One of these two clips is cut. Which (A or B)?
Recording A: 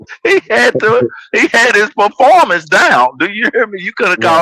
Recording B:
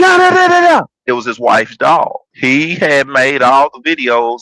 B